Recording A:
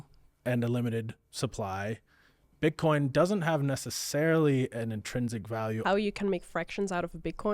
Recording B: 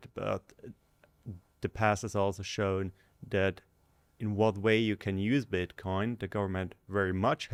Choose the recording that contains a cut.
A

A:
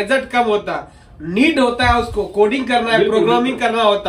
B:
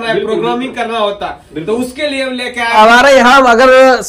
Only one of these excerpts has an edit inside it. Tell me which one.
B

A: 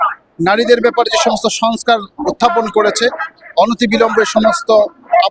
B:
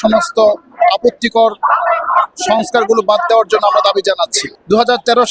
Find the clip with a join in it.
B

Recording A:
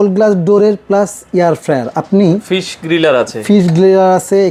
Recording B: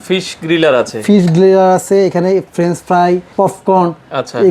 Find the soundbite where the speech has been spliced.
B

